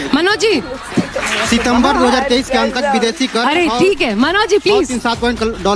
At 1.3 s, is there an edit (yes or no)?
yes